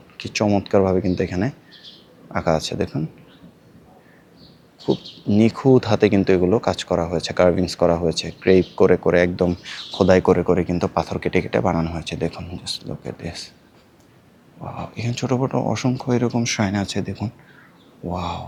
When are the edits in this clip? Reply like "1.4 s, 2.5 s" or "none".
none